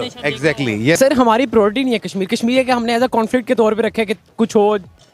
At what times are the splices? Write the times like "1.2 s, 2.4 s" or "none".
1.0 s